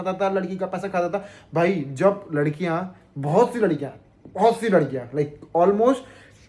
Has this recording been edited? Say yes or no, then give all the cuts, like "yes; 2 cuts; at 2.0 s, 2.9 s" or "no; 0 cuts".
no; 0 cuts